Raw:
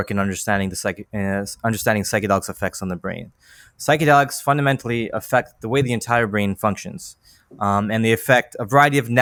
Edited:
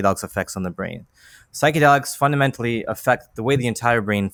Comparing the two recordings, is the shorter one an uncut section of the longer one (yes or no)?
yes